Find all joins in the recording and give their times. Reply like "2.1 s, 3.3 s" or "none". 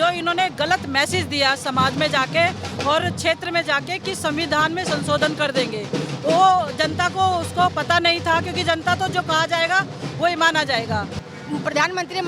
11.2 s